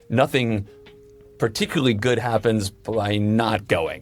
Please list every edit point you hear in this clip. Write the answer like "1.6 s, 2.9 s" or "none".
none

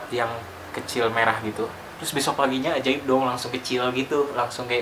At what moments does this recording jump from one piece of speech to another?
none

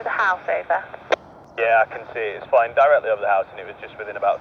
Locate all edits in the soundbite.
1.4 s

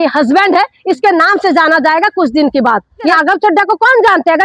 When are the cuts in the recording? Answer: 3.1 s

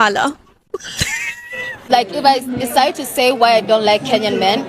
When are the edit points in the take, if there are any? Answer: 1.9 s

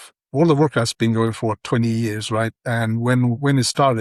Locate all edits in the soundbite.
none

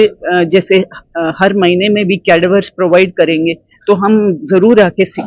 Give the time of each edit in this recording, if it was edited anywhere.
none

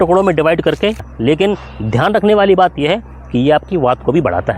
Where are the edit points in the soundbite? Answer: 1.1 s

